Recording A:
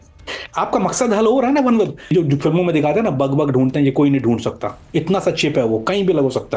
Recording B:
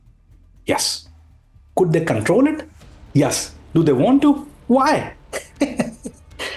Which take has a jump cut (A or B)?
A